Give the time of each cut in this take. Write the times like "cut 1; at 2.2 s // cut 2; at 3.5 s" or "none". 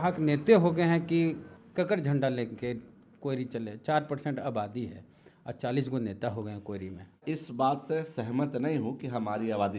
cut 1; at 1.5 s // cut 2; at 7.2 s